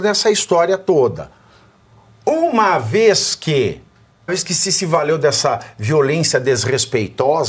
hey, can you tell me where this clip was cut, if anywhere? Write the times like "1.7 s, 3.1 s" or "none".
4.3 s